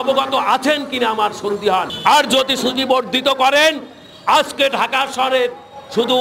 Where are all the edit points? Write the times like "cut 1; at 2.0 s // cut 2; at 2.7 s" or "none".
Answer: cut 1; at 1.9 s

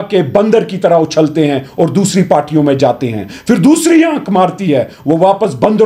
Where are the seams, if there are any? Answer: none

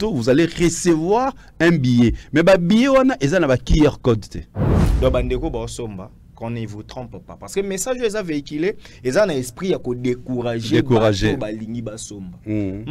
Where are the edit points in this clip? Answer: cut 1; at 4.8 s

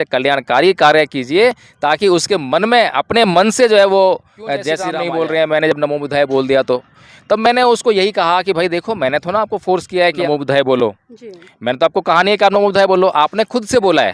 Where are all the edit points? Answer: cut 1; at 4.9 s // cut 2; at 10.2 s

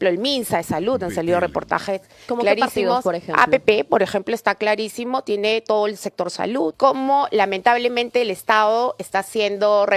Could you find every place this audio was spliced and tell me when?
cut 1; at 6.7 s

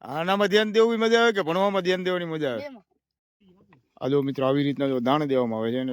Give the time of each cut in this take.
cut 1; at 3.4 s

